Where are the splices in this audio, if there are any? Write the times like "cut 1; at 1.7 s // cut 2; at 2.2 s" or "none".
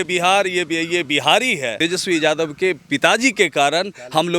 cut 1; at 1.8 s